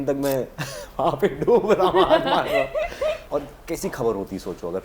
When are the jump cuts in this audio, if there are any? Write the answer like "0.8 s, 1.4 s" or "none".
3.2 s